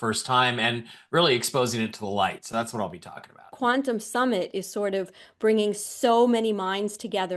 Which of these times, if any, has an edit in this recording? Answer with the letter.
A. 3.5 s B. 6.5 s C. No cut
A